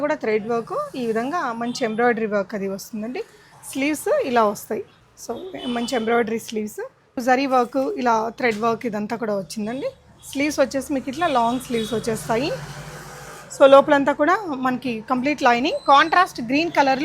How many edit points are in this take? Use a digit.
1